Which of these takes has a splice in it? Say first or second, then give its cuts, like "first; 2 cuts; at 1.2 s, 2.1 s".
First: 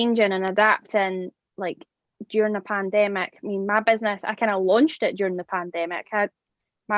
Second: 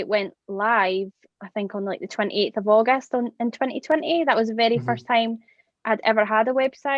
second; 1 cut; at 1.2 s